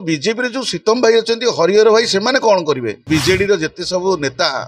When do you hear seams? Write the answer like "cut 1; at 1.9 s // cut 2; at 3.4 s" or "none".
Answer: cut 1; at 3.1 s